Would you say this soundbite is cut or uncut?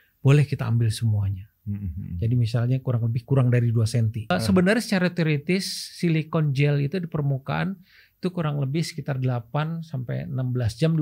cut